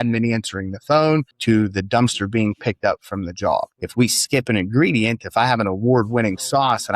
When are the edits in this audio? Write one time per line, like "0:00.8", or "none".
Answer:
0:01.3
0:03.8